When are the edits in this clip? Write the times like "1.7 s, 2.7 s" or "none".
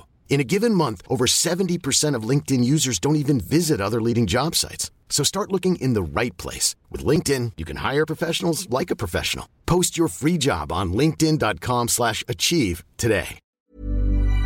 13.4 s